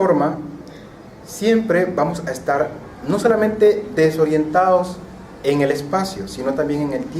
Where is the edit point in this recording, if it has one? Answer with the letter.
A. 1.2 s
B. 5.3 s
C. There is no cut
B